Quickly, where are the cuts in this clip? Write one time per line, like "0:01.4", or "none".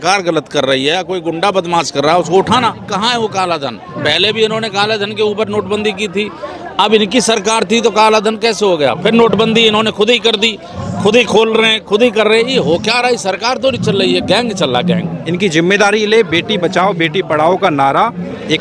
0:02.8
0:15.2

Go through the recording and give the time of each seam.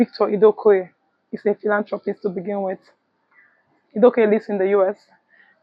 none

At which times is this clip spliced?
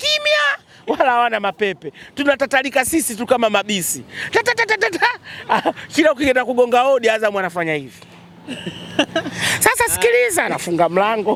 none

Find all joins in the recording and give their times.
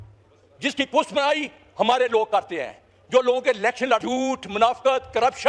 0:04.0

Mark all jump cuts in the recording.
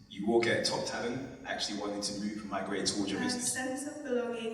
0:03.2

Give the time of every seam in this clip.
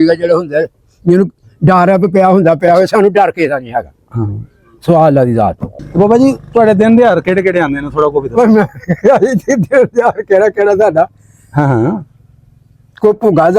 0:05.7

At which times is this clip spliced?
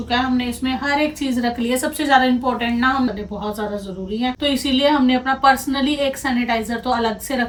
none

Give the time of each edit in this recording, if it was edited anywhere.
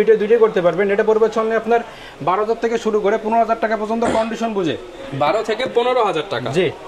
none

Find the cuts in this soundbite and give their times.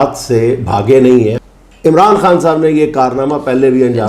0:01.4

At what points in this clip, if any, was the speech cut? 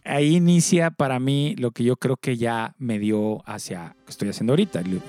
none

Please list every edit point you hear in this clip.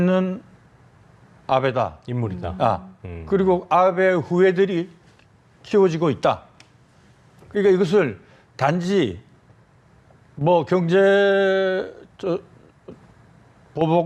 none

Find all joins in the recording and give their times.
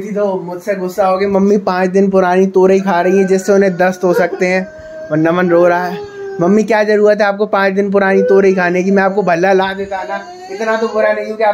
none

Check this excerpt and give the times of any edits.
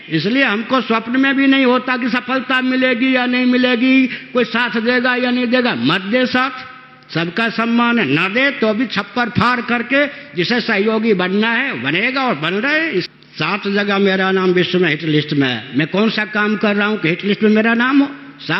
0:13.1

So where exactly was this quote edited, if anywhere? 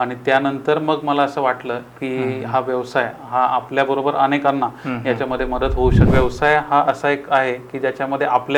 0:06.1

